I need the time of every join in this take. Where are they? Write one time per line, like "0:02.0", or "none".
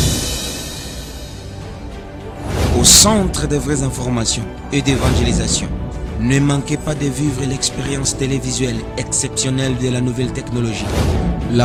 none